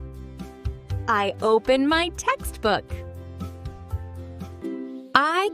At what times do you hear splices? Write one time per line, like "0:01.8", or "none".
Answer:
0:04.5